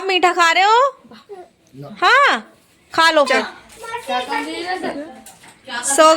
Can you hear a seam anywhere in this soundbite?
yes; 1 cut; at 3.3 s

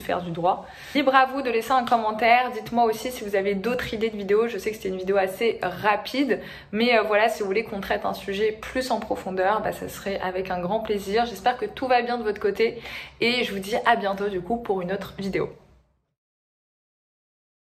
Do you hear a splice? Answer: no; 0 cuts

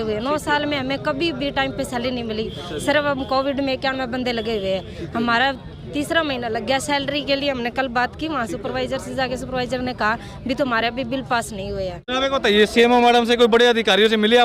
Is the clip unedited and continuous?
no; 1 cut; at 12.0 s

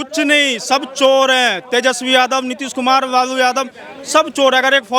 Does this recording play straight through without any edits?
yes; 0 cuts

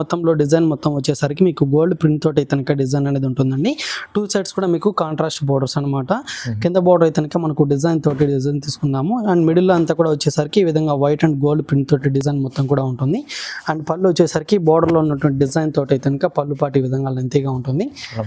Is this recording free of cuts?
yes; 0 cuts

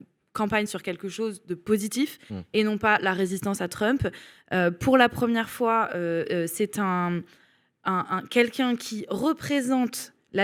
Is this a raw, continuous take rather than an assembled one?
yes; 0 cuts

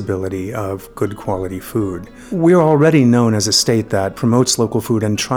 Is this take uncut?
no; 2 cuts; at 2.3 s, 4.1 s

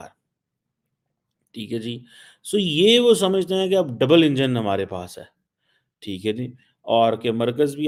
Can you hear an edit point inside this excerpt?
no; 0 cuts

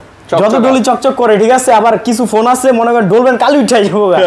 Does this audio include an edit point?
no; 0 cuts

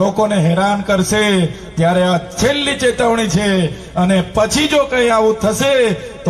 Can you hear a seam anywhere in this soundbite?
no; 0 cuts

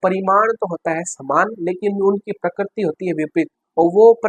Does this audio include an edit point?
no; 0 cuts

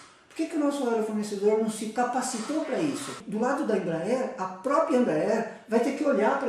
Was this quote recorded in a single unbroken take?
no; 1 cut; at 3.2 s

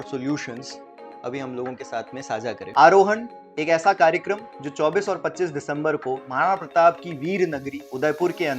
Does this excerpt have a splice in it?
yes; 1 cut; at 2.6 s

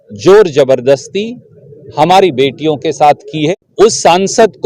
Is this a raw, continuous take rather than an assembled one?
no; 1 cut; at 3.5 s

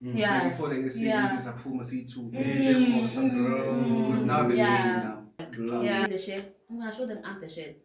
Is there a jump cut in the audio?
yes; 1 cut; at 6.0 s

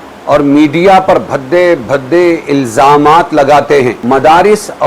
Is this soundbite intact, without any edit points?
no; 1 cut; at 4.0 s

